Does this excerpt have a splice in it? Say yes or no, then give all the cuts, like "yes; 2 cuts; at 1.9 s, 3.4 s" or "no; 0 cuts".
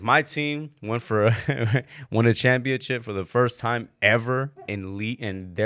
no; 0 cuts